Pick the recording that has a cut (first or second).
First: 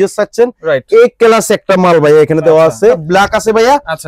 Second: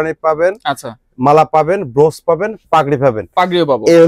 first